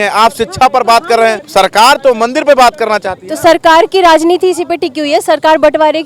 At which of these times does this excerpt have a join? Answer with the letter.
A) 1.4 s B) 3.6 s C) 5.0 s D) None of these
A